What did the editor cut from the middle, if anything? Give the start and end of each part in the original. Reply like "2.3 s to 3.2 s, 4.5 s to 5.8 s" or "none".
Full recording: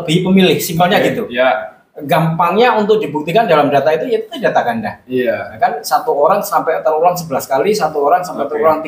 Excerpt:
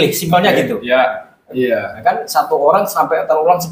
1.9 s to 4.9 s